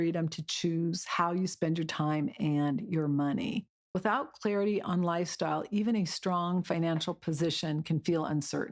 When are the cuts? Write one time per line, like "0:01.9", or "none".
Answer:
0:03.9